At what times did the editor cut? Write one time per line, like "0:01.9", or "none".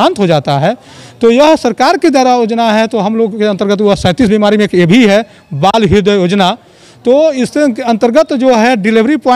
none